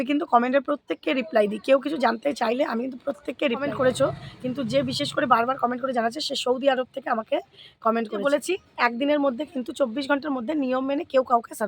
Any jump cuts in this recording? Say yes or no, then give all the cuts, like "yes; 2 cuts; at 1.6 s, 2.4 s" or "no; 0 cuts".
yes; 2 cuts; at 3.7 s, 8.2 s